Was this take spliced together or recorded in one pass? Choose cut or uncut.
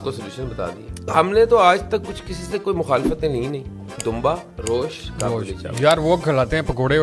uncut